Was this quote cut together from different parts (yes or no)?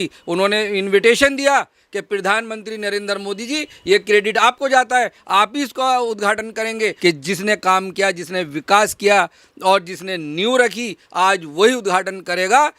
yes